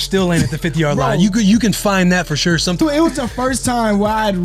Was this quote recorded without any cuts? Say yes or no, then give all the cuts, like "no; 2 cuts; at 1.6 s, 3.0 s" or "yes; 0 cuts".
no; 1 cut; at 2.8 s